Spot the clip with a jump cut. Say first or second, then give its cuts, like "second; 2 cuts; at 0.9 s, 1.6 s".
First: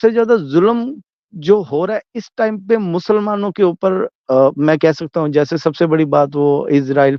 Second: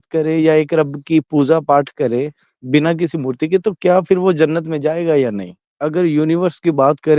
second; 1 cut; at 5.7 s